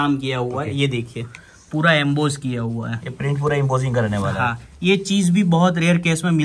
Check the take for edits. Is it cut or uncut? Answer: uncut